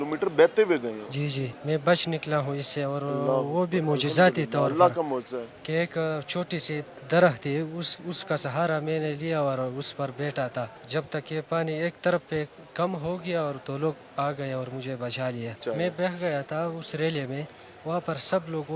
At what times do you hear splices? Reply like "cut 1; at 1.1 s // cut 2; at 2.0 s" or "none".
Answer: cut 1; at 1.5 s // cut 2; at 10.8 s // cut 3; at 15.6 s